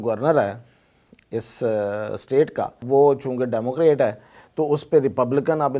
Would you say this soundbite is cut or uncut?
cut